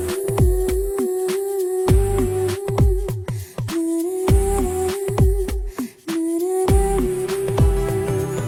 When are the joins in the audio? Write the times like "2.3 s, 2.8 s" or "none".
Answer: none